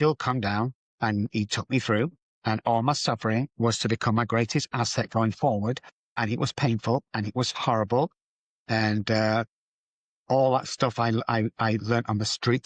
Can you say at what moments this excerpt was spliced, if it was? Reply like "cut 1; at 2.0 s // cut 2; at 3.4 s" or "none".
cut 1; at 1.0 s // cut 2; at 3.5 s // cut 3; at 6.2 s